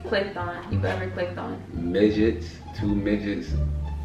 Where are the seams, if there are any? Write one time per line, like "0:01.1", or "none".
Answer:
0:01.7